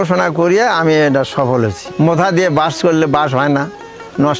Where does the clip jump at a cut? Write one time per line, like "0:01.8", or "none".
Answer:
none